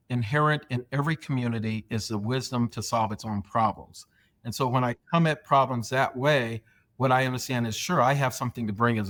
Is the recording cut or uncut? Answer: uncut